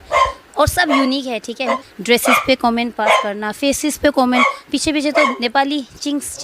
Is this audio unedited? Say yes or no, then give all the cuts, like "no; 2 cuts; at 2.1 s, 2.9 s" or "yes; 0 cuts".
no; 1 cut; at 1.7 s